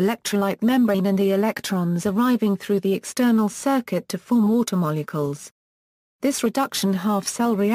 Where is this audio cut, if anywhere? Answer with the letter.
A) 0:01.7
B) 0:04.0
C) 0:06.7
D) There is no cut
C